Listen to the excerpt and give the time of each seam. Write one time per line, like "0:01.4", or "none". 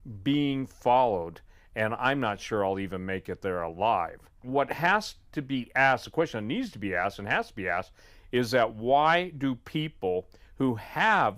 0:05.6